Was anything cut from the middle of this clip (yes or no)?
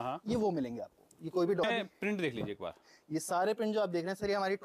yes